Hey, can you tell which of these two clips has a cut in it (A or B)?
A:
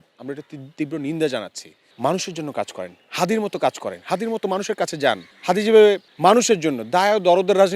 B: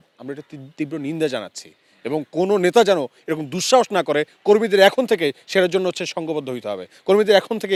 A